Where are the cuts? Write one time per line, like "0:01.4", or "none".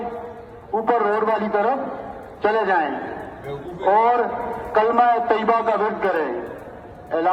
none